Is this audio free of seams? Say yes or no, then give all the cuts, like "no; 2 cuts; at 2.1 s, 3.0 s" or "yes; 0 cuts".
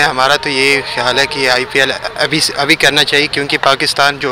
yes; 0 cuts